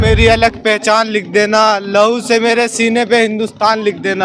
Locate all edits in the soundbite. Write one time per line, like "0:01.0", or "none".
none